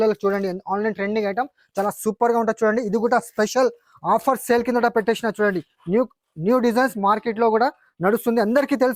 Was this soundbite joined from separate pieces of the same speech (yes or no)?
no